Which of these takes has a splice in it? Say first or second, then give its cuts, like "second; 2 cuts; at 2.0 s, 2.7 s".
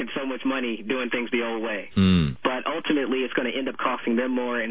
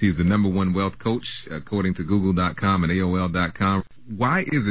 second; 2 cuts; at 1.4 s, 3.8 s